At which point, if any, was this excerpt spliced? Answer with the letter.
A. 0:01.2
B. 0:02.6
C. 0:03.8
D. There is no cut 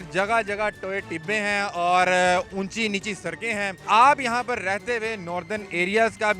C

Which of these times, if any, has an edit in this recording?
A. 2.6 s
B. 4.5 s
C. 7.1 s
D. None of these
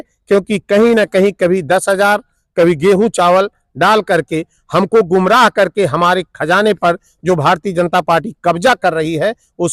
D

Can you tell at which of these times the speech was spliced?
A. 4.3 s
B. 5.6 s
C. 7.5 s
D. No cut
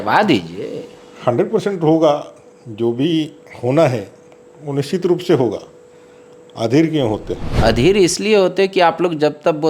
C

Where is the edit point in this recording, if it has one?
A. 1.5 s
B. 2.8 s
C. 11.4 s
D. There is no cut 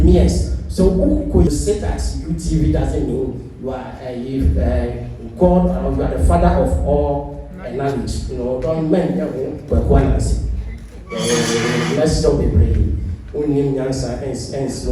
A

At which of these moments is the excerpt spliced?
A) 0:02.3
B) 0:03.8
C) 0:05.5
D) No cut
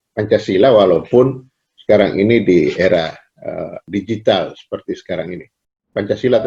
B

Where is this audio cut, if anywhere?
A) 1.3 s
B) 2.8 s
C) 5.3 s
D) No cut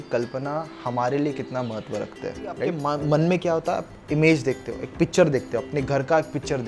B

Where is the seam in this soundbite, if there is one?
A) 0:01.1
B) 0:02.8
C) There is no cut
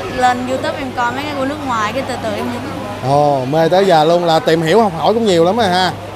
C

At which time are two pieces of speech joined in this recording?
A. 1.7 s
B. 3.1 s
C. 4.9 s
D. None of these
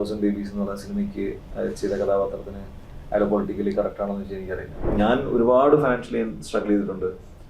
C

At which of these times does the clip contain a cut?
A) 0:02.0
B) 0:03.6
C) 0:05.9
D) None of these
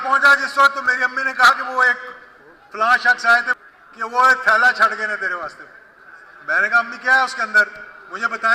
B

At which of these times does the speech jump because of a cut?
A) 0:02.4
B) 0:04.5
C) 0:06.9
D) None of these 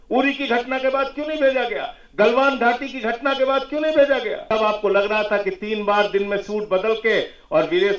B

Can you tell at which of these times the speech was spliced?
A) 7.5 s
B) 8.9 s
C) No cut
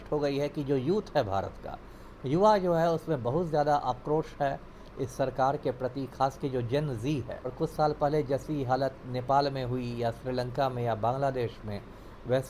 A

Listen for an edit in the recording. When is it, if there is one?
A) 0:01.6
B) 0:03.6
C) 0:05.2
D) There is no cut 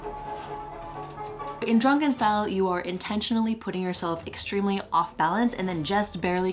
A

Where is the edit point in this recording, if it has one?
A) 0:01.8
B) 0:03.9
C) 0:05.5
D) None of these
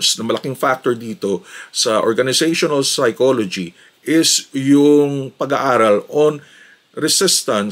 D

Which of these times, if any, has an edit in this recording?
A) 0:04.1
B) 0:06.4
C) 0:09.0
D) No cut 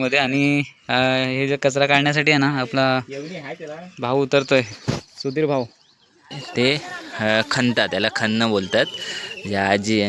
B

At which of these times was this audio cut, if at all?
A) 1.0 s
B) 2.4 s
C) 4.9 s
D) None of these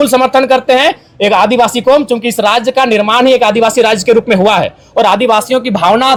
D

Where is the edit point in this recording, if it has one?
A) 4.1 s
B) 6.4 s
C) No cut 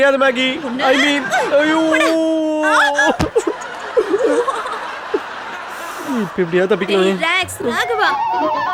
C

